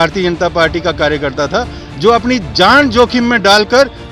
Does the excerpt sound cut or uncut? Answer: uncut